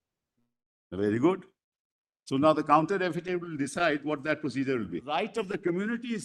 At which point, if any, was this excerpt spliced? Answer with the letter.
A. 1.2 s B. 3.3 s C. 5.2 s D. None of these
C